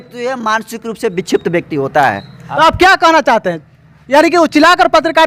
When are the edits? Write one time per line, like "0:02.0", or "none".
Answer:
none